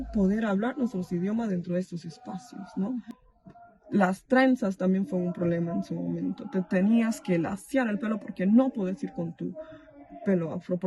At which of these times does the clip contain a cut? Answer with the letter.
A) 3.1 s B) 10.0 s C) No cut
A